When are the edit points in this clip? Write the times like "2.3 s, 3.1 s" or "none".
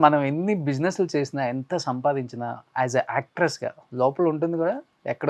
2.7 s